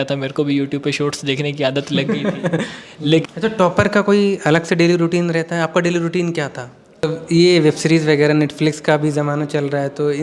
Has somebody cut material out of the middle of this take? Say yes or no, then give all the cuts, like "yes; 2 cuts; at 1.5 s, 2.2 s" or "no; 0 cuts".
yes; 2 cuts; at 3.2 s, 7.0 s